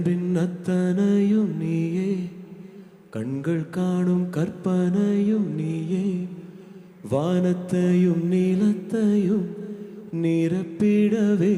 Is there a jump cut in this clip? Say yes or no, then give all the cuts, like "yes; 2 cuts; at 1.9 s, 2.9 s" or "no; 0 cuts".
no; 0 cuts